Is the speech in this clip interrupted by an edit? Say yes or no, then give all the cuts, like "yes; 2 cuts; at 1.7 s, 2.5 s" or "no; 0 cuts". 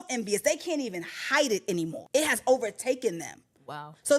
yes; 1 cut; at 2.0 s